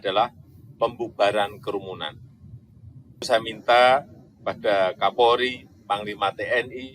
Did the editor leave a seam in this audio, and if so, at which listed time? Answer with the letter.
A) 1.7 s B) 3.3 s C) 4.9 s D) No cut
B